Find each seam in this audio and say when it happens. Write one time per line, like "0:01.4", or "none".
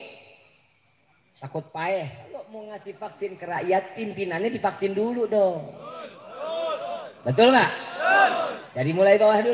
0:02.5

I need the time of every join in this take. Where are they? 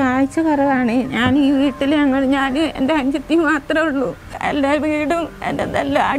0:04.4

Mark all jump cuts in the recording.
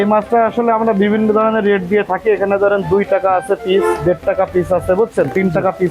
none

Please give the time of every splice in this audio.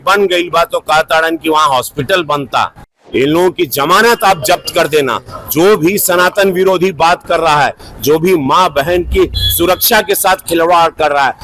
0:02.9

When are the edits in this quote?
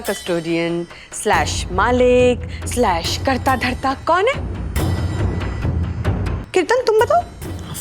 0:06.4

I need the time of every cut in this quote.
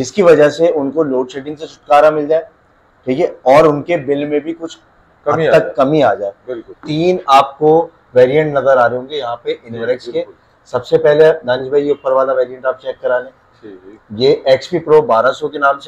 0:06.8

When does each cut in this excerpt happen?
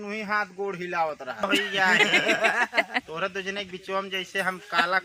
0:01.4

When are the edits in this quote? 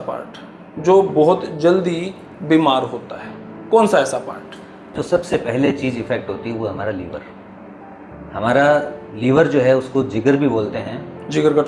0:05.0

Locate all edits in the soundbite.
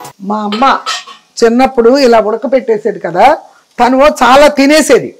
none

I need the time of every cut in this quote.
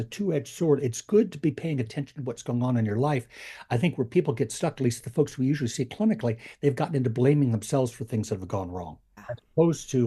0:09.1

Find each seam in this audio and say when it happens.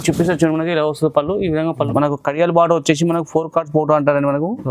0:01.8

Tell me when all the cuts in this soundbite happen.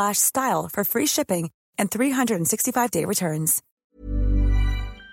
0:03.7

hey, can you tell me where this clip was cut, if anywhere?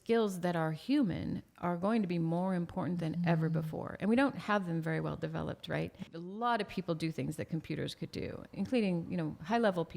0:06.1
0:08.6

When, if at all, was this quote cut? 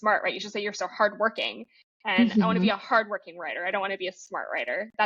none

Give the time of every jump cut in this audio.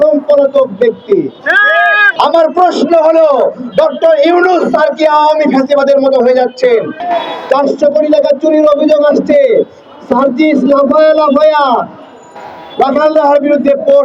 0:02.0
0:07.0

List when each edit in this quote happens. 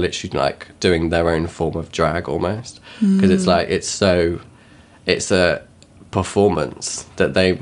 none

